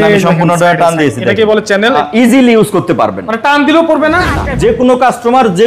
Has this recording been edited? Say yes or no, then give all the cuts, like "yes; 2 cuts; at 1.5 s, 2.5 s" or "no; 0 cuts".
yes; 2 cuts; at 2.0 s, 4.4 s